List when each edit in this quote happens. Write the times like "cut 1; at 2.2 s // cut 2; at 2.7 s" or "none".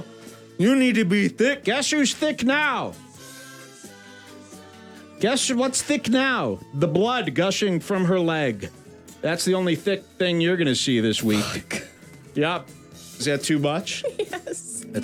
none